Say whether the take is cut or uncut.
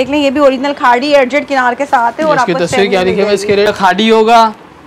cut